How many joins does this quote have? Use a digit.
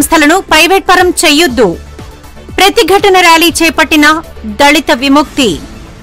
0